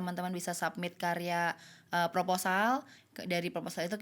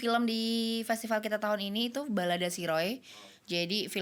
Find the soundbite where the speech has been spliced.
first; 1 cut; at 3.0 s

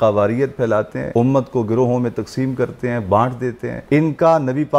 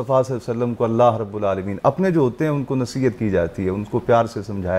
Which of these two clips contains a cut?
first; 2 cuts; at 1.0 s, 3.7 s

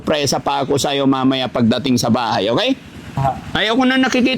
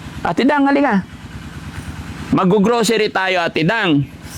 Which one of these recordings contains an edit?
first; 1 cut; at 3.2 s

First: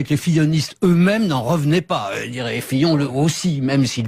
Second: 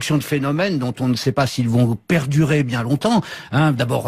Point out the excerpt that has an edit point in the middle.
second; 1 cut; at 2.1 s

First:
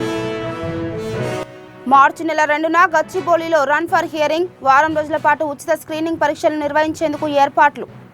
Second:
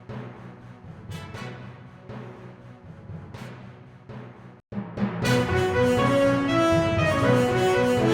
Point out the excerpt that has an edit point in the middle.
first; 1 cut; at 1.4 s

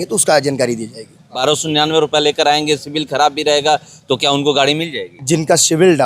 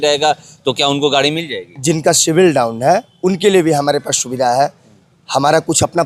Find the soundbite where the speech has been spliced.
first; 1 cut; at 1.4 s

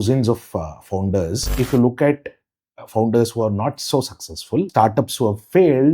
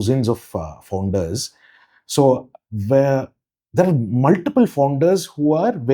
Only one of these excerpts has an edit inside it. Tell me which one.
first; 2 cuts; at 1.5 s, 4.7 s

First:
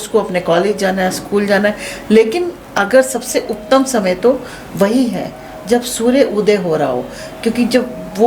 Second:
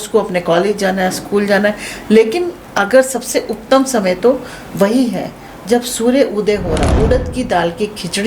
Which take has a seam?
second; 1 cut; at 6.9 s

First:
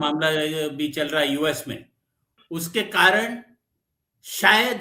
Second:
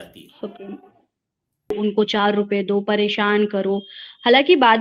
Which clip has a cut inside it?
second; 1 cut; at 1.8 s

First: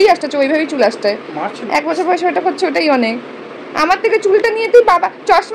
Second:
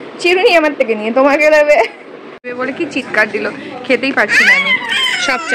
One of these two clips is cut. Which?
second; 1 cut; at 2.4 s

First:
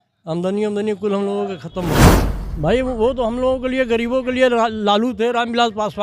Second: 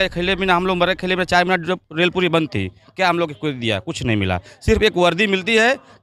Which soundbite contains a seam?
first; 1 cut; at 2.0 s

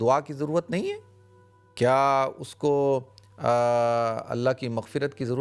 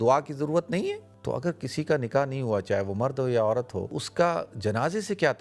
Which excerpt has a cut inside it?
second; 2 cuts; at 1.1 s, 4.0 s

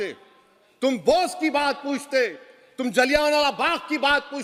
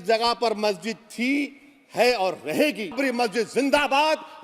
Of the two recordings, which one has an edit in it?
second; 1 cut; at 3.0 s

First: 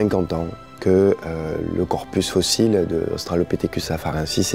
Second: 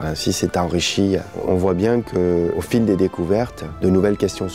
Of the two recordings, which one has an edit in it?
second; 3 cuts; at 1.4 s, 2.6 s, 3.6 s

